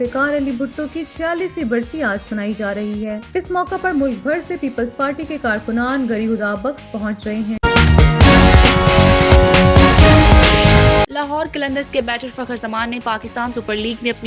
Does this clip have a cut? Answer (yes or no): yes